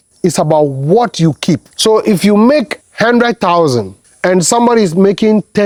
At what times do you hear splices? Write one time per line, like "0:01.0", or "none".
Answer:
none